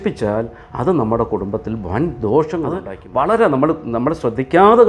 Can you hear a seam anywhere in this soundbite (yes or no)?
yes